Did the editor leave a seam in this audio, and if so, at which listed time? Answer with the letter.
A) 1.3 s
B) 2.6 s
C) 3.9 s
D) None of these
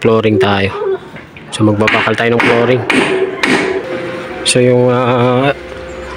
C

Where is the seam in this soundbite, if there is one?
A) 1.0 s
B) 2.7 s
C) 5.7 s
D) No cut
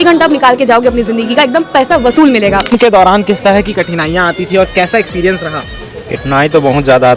B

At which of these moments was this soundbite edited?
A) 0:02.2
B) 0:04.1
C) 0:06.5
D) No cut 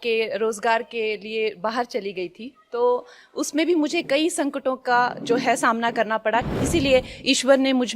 C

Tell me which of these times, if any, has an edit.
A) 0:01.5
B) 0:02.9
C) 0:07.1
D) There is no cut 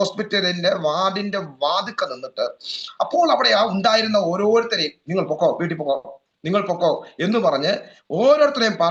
D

